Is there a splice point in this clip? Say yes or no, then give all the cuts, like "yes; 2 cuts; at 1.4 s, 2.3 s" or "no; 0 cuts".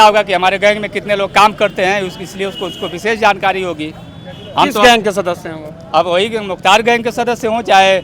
no; 0 cuts